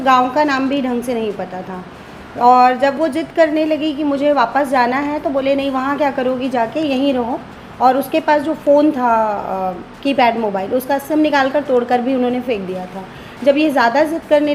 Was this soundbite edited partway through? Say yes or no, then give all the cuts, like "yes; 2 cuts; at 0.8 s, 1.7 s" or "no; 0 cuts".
no; 0 cuts